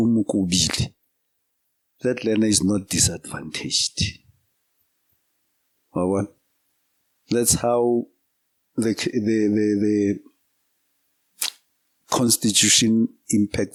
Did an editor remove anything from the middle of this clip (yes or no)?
no